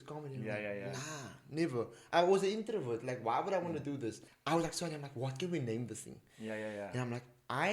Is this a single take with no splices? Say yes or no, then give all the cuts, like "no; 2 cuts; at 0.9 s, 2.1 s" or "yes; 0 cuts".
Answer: no; 1 cut; at 4.3 s